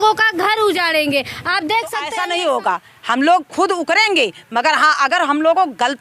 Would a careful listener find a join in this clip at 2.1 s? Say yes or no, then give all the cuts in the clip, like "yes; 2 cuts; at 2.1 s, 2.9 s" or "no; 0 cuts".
yes; 1 cut; at 2.1 s